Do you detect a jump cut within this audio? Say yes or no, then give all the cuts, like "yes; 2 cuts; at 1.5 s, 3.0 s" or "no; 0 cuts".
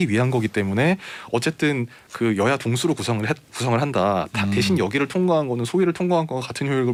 no; 0 cuts